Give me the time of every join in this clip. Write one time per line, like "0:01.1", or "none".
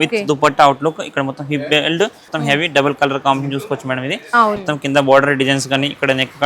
0:02.2
0:04.6